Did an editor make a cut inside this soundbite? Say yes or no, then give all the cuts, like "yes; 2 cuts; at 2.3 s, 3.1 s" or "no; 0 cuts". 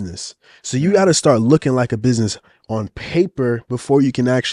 no; 0 cuts